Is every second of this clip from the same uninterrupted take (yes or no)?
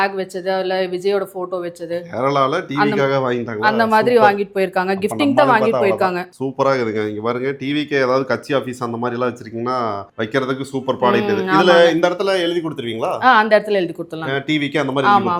yes